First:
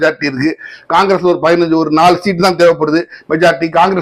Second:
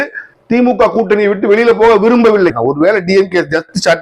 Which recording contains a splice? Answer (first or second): second